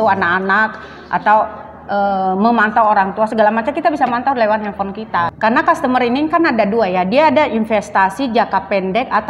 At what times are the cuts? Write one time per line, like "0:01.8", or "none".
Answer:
0:05.3